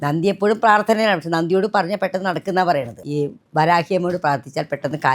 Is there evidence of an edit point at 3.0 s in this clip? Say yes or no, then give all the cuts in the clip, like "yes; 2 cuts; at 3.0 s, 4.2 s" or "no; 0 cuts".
yes; 1 cut; at 3.0 s